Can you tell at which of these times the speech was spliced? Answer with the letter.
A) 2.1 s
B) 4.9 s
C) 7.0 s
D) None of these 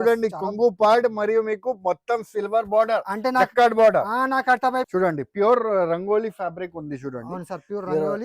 B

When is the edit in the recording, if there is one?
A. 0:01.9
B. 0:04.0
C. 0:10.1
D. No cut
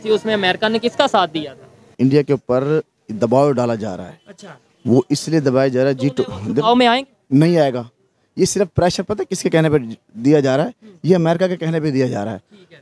A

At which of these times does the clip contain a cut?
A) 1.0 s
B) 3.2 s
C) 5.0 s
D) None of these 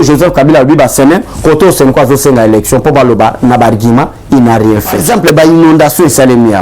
C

